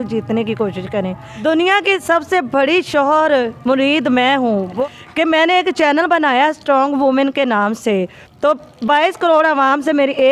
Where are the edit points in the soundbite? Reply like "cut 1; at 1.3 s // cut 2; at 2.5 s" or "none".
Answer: cut 1; at 1.2 s // cut 2; at 4.8 s